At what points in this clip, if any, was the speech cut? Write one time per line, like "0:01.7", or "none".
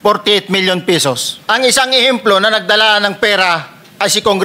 0:01.3